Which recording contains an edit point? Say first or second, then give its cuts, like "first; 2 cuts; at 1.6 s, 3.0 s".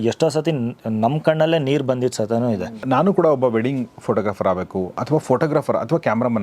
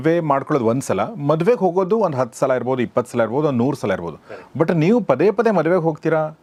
first; 1 cut; at 2.8 s